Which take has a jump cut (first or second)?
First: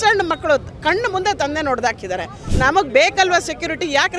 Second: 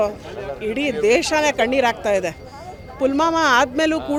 first